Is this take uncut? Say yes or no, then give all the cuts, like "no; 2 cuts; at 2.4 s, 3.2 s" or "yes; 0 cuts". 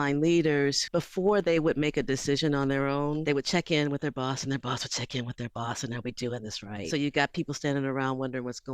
no; 2 cuts; at 3.2 s, 6.9 s